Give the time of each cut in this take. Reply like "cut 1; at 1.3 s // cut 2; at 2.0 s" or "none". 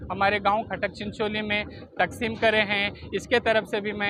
none